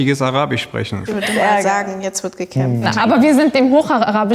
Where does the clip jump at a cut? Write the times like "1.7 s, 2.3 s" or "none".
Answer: 1.0 s, 2.9 s